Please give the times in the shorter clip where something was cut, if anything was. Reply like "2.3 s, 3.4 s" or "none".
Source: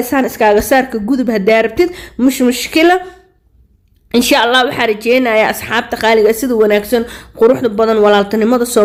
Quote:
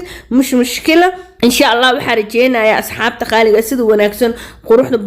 1.3 s